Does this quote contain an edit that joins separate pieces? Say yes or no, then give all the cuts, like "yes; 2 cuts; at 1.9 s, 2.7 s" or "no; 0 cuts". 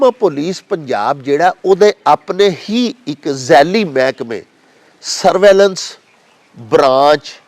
no; 0 cuts